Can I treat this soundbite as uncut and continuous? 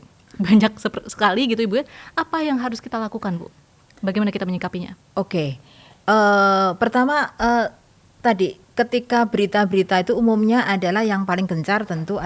yes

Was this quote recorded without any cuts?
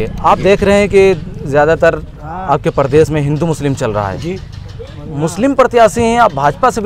yes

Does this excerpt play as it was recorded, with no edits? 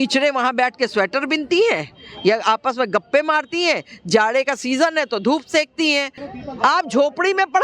no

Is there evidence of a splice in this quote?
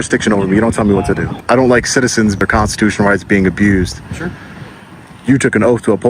yes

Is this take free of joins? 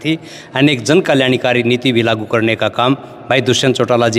yes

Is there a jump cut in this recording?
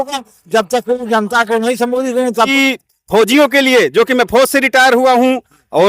yes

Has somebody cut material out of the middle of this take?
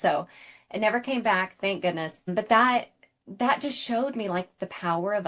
yes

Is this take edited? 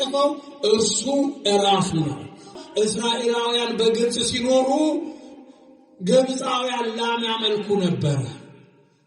yes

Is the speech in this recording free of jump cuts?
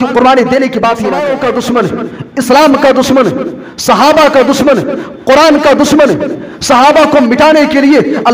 no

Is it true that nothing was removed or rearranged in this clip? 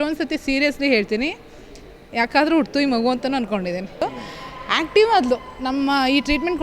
no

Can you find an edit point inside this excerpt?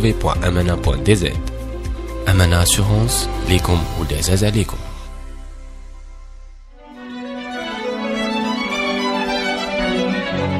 yes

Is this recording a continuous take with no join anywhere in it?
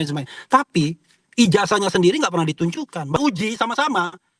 no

